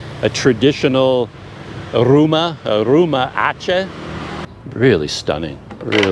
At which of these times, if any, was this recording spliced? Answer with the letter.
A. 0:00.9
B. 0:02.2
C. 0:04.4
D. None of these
C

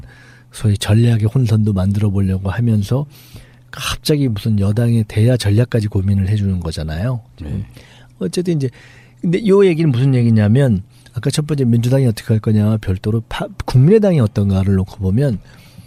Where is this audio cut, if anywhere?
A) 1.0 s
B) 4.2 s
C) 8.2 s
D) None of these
D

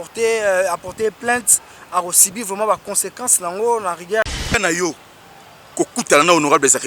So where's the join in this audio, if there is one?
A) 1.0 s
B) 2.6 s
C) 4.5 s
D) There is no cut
C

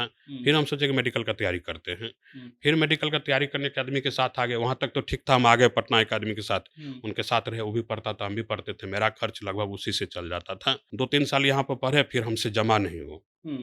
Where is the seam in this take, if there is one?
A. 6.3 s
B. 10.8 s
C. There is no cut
B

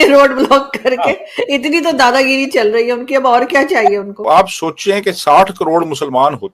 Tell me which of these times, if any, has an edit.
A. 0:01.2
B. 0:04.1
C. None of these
B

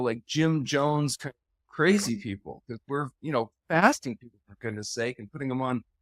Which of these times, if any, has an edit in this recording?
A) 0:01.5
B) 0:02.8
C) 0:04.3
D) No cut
D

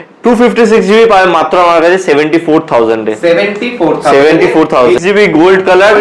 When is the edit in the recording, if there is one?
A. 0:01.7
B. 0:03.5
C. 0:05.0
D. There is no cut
C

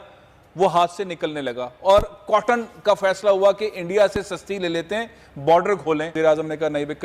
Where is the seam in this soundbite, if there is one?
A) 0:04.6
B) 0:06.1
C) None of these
B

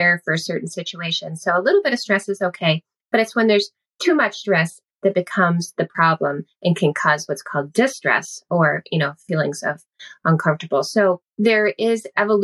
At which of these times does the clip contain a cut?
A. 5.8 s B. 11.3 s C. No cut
B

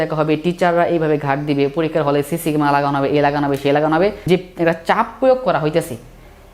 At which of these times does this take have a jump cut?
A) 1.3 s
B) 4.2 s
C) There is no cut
B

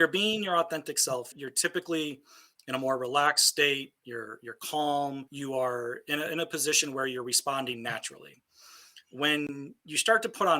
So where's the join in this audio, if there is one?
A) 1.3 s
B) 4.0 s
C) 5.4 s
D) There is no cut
A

